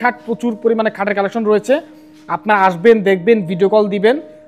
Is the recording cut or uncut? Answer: uncut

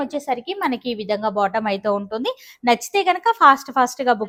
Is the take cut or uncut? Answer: uncut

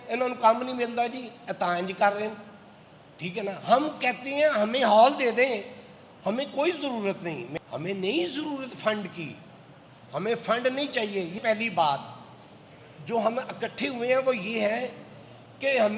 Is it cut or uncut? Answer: cut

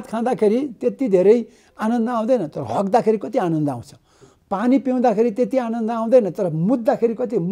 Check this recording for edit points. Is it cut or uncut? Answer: uncut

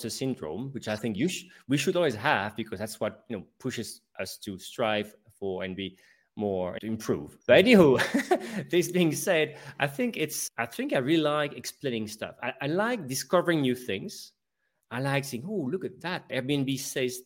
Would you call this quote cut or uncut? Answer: cut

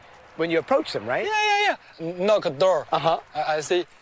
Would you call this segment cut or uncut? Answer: uncut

